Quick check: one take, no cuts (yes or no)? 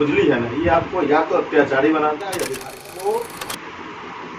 no